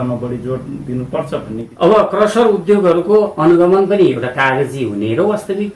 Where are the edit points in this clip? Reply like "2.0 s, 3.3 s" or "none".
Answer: 1.6 s

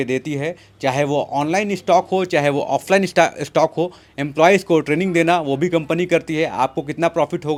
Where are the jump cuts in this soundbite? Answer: none

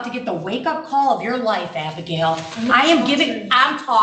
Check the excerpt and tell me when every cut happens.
none

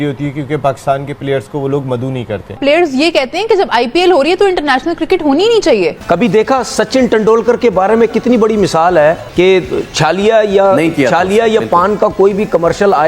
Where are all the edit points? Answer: 2.6 s, 6.0 s, 9.2 s

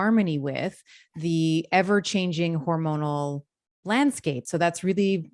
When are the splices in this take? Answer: 4.4 s

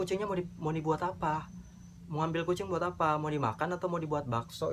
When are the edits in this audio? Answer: none

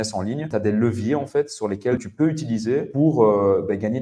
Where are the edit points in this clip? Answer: none

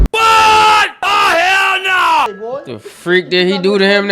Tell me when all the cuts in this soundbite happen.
2.3 s

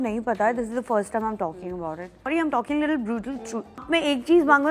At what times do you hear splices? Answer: 2.3 s, 3.8 s

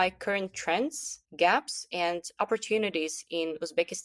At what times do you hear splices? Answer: none

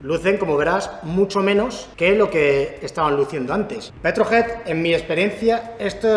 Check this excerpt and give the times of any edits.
3.8 s

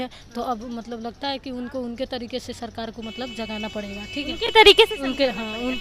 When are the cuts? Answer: none

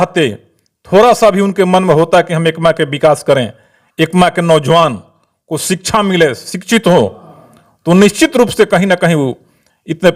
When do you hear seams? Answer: none

